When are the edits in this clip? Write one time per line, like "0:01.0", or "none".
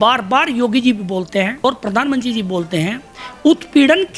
0:01.6